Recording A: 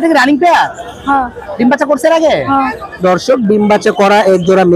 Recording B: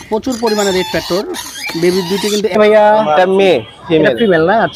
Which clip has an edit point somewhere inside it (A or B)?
B